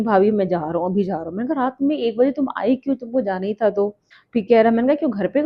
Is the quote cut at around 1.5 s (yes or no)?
no